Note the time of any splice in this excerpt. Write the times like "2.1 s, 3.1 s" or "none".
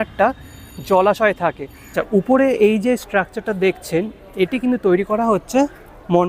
2.0 s

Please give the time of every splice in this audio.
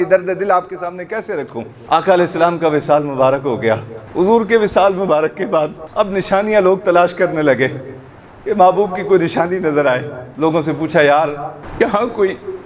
1.7 s, 4.0 s, 5.8 s, 10.2 s, 11.6 s

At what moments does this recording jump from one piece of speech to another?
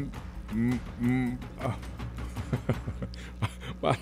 none

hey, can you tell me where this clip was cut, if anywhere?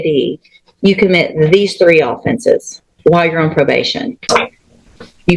4.2 s

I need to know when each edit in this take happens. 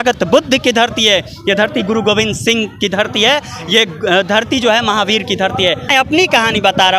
5.9 s

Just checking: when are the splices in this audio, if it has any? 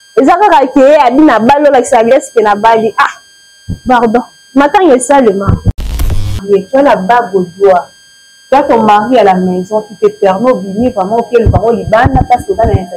6.2 s

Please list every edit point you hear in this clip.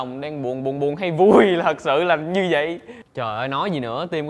2.9 s

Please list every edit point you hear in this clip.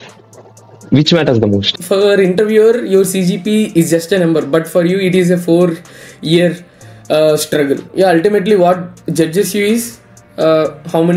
1.8 s, 7.9 s

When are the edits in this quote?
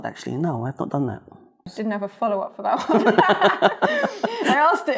1.7 s

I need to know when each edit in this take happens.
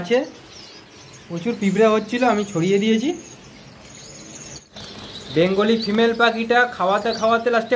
4.7 s

